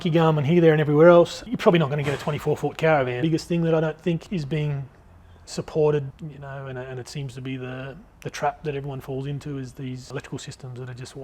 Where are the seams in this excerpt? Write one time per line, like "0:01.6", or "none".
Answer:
0:01.4
0:03.2
0:04.2
0:06.2
0:10.1